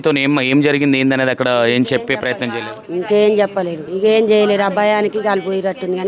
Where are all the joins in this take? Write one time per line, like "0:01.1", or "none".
0:03.8